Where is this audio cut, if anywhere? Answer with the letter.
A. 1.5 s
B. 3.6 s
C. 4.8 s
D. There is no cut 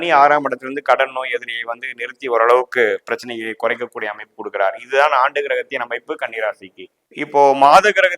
D